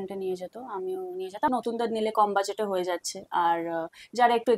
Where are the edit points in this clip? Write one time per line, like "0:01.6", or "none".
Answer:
0:01.5